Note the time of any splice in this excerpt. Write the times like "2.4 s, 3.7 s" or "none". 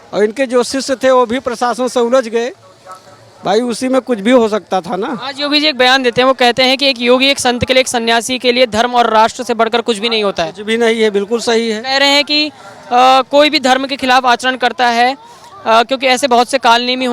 none